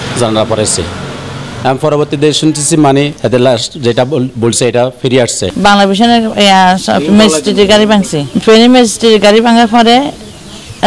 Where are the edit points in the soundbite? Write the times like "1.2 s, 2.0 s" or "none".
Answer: 3.2 s, 5.4 s